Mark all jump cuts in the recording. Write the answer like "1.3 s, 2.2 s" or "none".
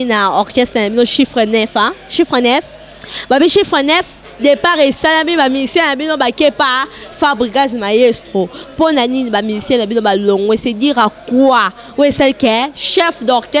none